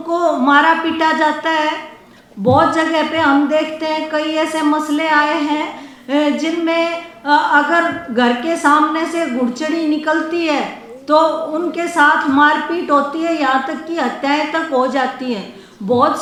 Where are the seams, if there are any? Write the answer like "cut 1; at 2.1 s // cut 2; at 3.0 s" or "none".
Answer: none